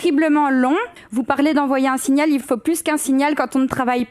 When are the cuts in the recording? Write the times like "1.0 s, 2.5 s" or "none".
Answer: 1.0 s